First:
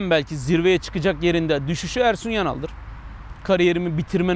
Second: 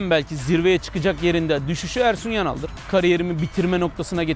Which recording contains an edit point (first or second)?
second